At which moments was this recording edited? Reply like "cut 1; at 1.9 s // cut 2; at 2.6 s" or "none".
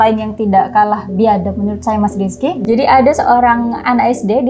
cut 1; at 2.6 s